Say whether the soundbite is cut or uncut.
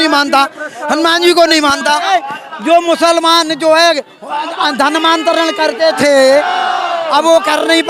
cut